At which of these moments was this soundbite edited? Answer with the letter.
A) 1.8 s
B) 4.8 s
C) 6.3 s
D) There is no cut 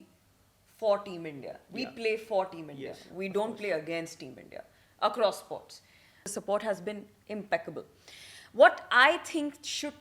C